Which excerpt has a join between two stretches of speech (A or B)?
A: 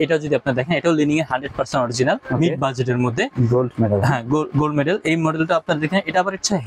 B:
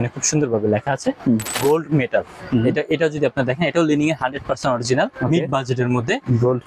B